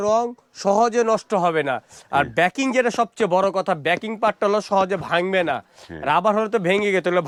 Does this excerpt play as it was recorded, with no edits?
yes; 0 cuts

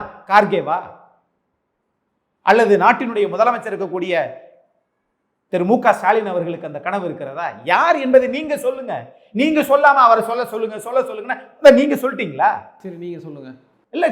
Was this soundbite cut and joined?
no; 0 cuts

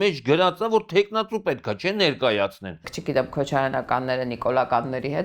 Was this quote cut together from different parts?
yes; 1 cut; at 2.9 s

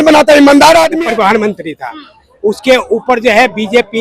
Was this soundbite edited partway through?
yes; 1 cut; at 0.9 s

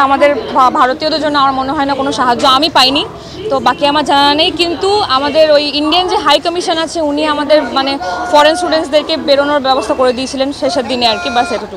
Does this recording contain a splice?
no; 0 cuts

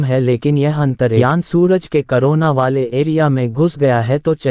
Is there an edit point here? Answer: yes; 1 cut; at 1.2 s

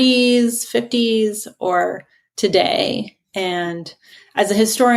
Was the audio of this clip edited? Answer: no; 0 cuts

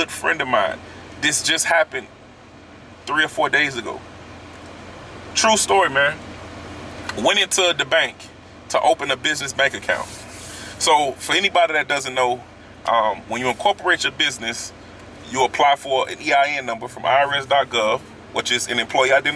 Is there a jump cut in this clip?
no; 0 cuts

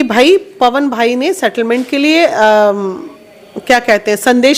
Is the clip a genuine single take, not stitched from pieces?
yes; 0 cuts

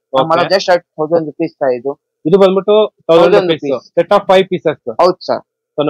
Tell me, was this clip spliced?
no; 0 cuts

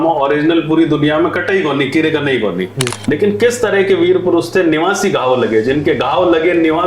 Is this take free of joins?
no; 1 cut; at 2.9 s

